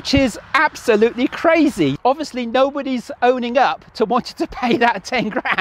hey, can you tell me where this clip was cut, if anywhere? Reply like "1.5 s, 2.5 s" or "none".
2.0 s